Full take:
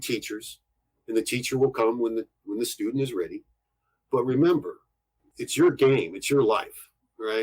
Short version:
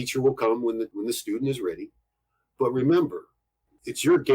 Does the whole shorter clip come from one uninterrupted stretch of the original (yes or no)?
no